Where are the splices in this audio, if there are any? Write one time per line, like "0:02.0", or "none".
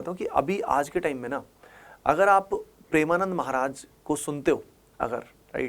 none